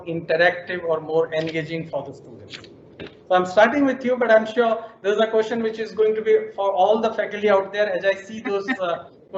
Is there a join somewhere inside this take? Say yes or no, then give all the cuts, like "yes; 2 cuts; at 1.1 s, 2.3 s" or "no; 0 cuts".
no; 0 cuts